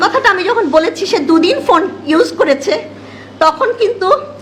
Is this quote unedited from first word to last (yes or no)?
yes